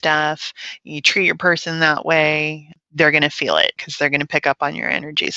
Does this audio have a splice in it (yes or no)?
yes